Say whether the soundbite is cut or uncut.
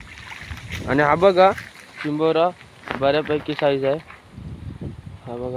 uncut